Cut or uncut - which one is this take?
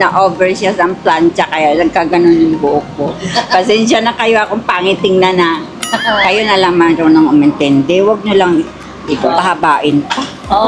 uncut